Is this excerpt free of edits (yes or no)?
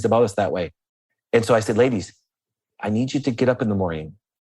yes